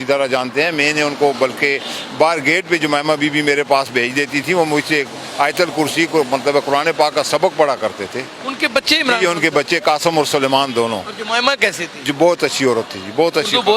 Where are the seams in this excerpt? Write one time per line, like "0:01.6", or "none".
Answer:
none